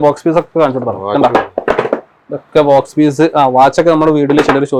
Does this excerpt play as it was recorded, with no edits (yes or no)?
yes